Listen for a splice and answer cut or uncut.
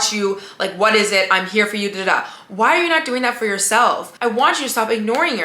cut